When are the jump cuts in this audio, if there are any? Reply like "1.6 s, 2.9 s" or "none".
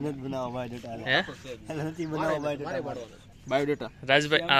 3.2 s